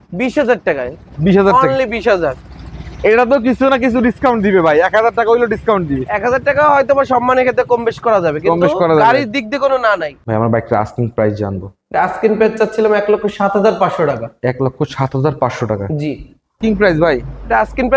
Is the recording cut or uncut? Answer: cut